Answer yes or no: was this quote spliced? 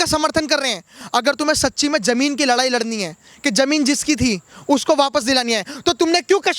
yes